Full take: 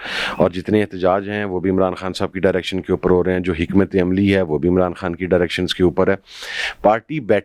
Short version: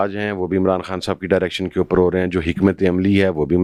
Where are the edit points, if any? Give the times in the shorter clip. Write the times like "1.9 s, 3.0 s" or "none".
none